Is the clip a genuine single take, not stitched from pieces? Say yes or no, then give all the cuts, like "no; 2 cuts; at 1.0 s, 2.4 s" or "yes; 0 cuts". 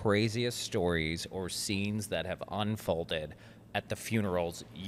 yes; 0 cuts